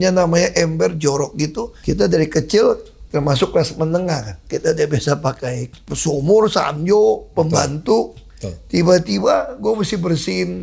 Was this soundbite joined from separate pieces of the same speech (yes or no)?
yes